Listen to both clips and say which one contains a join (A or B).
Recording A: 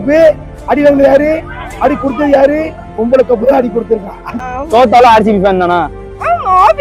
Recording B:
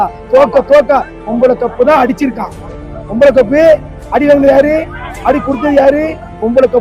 A